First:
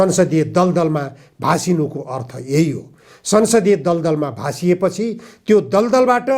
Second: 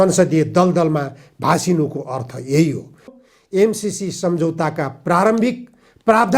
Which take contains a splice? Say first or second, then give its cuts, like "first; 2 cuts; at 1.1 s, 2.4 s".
second; 1 cut; at 3.1 s